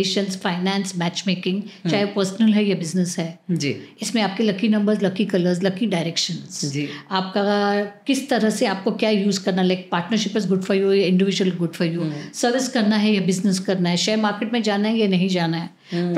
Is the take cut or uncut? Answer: uncut